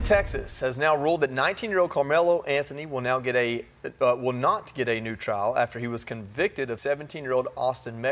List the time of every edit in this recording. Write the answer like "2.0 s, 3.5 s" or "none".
6.8 s